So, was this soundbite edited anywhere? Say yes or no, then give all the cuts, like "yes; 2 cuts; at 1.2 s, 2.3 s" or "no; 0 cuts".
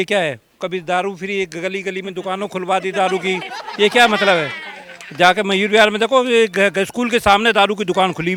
no; 0 cuts